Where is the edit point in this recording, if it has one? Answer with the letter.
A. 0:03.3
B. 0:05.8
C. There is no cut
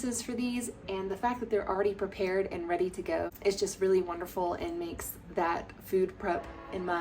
A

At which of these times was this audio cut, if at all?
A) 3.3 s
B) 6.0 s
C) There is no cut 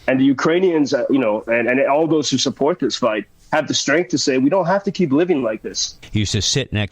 B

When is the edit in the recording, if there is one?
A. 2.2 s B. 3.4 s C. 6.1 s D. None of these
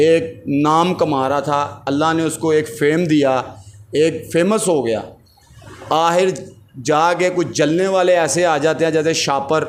D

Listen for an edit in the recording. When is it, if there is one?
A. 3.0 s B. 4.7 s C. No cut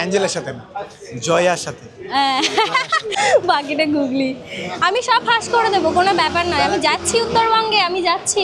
A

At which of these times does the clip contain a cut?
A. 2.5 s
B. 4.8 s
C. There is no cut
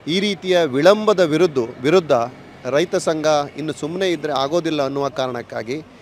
C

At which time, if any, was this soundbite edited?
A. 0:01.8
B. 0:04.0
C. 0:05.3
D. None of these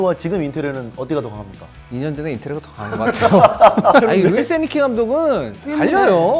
B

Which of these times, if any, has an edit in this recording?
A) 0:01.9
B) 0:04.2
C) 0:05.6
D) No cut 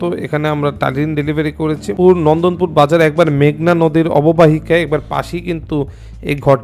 A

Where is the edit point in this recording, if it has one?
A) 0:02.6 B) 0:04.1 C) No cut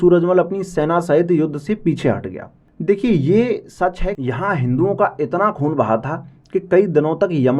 B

